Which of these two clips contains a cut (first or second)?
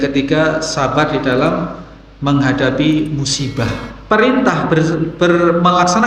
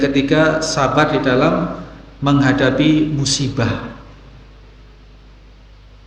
first